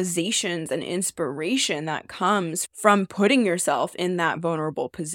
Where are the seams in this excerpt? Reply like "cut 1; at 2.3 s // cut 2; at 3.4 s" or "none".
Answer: cut 1; at 2.6 s

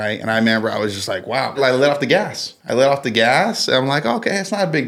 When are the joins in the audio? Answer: cut 1; at 1.6 s

